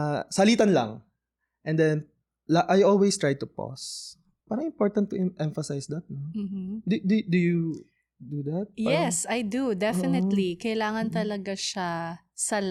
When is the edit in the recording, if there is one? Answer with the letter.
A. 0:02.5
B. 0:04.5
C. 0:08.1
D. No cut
D